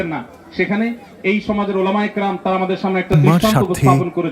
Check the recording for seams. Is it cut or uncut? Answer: uncut